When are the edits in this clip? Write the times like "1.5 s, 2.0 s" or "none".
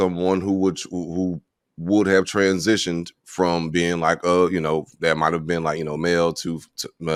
none

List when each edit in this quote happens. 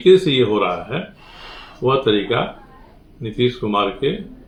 none

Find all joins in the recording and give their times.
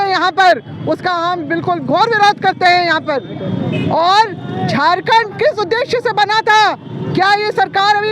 none

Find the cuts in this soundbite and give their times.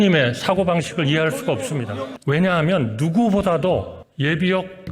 2.1 s, 4.0 s

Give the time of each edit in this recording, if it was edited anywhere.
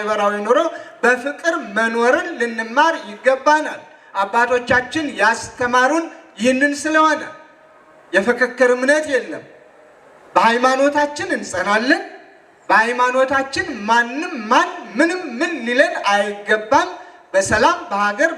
none

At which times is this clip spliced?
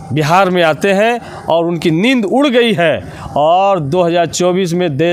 none

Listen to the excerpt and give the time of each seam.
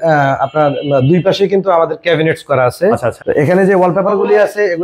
3.1 s

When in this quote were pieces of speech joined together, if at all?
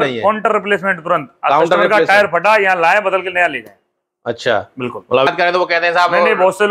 5.3 s

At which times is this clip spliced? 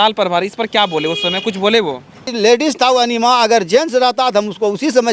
2.3 s

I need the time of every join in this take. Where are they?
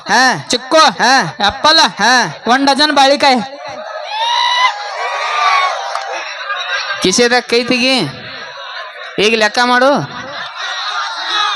6.2 s

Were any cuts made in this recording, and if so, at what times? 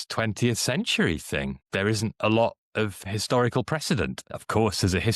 1.6 s, 3.0 s, 4.2 s

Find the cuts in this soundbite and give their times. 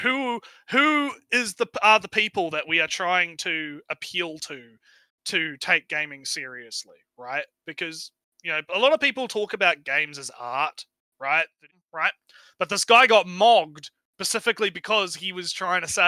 11.7 s

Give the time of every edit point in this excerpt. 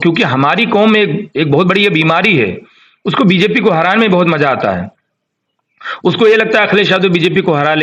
none

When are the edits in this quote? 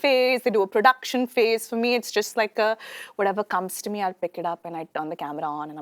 none

